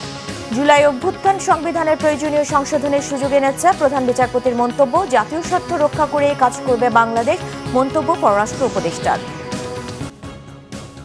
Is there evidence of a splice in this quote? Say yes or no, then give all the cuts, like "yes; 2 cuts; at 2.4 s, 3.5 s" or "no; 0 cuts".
yes; 1 cut; at 10.1 s